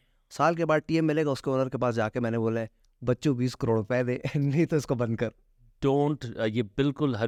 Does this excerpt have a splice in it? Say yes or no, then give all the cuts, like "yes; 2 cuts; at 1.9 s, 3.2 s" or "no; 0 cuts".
no; 0 cuts